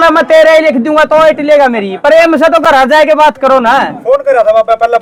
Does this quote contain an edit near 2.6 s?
no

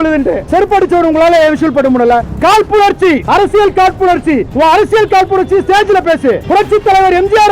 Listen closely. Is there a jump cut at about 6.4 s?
yes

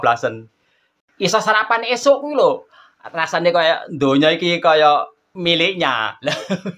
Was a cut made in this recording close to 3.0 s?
no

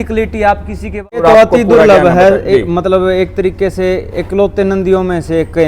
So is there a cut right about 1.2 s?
yes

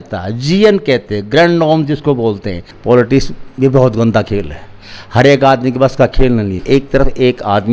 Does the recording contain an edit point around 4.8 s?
no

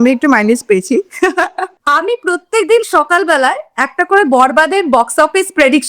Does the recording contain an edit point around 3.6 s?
no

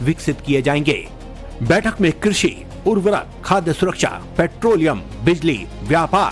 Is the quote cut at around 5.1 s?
yes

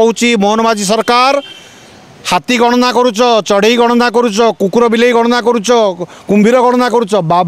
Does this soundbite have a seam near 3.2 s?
no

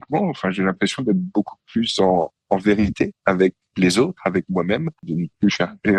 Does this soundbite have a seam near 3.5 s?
no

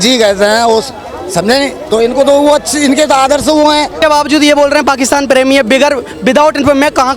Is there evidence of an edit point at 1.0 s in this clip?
no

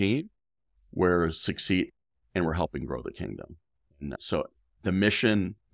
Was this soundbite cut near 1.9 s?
yes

